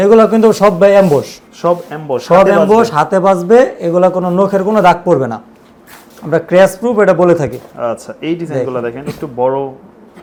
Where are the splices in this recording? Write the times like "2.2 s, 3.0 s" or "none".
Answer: none